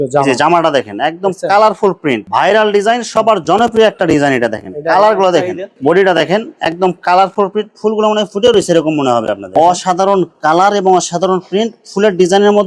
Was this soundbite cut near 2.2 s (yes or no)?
yes